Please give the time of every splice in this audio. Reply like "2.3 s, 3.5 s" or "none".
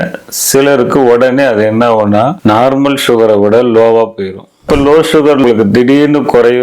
2.4 s, 4.7 s